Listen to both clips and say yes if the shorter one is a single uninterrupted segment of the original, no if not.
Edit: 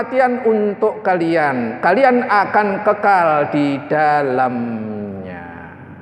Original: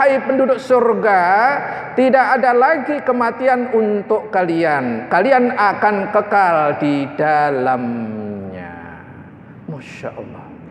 yes